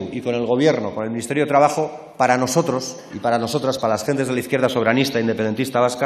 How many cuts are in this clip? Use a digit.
0